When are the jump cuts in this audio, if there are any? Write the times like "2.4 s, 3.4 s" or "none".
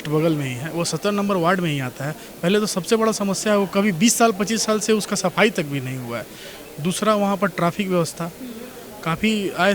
none